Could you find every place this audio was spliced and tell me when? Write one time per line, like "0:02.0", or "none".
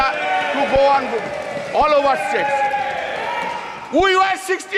none

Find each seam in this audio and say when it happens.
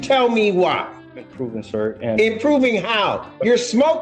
none

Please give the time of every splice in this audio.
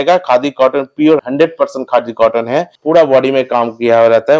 0:01.2
0:02.7

